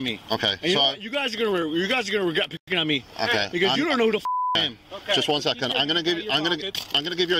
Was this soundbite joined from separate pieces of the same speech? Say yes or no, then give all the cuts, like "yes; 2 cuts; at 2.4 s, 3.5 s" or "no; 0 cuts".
no; 0 cuts